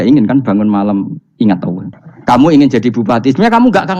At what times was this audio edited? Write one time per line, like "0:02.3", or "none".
0:01.8